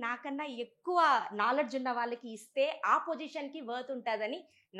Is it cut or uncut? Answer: uncut